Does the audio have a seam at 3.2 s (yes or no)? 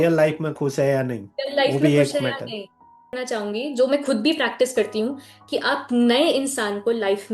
yes